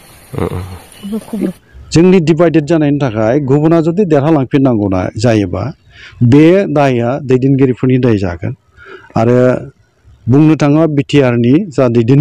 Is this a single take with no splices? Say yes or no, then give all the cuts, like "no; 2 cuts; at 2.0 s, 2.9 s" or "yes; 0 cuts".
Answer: no; 1 cut; at 1.5 s